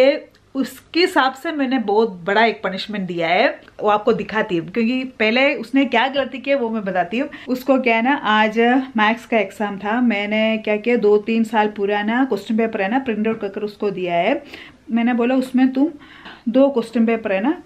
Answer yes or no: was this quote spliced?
no